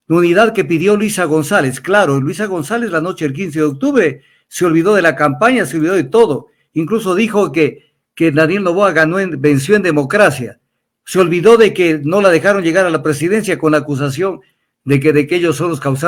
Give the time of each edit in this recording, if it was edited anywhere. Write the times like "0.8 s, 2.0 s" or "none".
none